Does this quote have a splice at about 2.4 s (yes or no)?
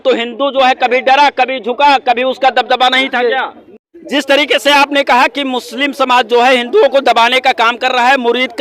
no